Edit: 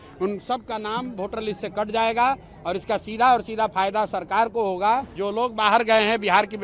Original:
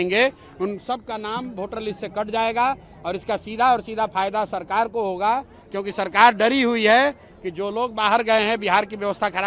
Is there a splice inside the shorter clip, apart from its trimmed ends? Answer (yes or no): yes